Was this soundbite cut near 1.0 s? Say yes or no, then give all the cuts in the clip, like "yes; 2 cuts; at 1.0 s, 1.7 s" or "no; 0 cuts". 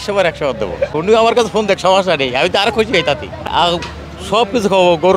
yes; 2 cuts; at 1.0 s, 3.4 s